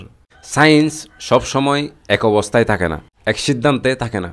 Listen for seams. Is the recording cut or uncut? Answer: cut